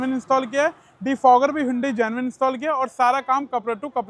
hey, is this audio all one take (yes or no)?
yes